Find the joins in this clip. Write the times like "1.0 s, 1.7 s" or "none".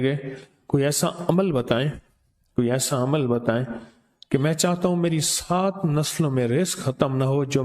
none